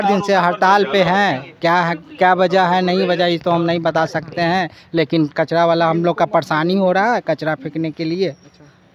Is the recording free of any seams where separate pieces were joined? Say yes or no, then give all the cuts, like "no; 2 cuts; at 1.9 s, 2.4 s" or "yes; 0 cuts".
yes; 0 cuts